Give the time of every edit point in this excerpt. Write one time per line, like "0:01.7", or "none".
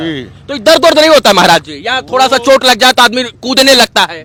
none